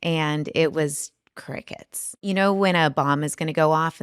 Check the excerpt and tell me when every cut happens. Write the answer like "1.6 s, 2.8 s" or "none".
2.2 s